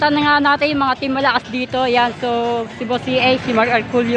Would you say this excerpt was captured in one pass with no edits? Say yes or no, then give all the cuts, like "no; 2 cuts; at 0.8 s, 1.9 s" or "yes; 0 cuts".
yes; 0 cuts